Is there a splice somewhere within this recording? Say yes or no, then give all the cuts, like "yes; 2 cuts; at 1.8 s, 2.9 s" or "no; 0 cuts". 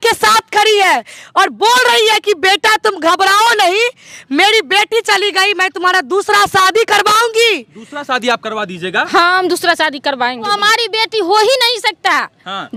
no; 0 cuts